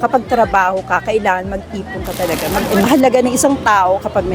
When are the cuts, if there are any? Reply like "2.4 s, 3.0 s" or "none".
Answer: 2.9 s

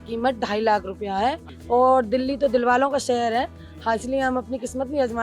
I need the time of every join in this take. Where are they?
1.5 s

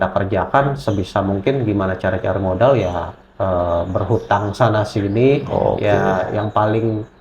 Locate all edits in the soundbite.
none

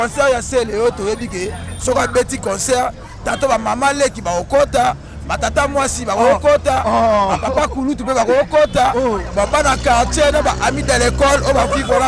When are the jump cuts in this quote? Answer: none

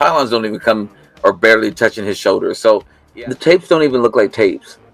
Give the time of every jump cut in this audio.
3.0 s

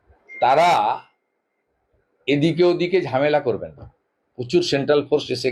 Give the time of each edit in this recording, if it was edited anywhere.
none

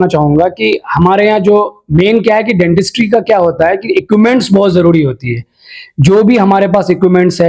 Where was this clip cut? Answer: none

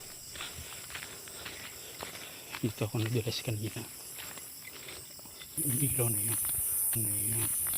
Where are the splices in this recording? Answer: 5.6 s

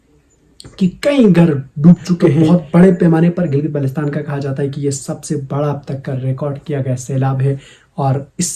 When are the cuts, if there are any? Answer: 2.5 s

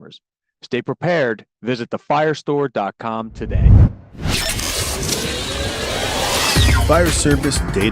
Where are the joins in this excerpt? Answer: 3.5 s

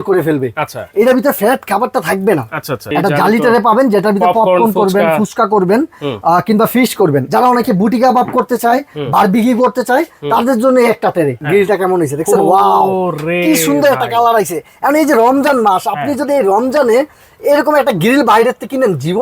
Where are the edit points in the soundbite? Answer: 2.9 s, 7.3 s, 11.4 s

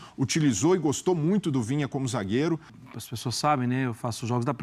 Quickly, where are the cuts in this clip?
2.7 s

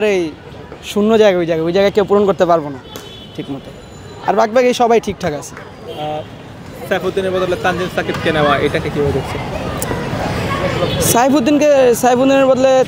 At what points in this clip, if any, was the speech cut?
none

